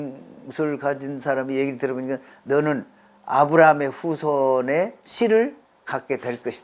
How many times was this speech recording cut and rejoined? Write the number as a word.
one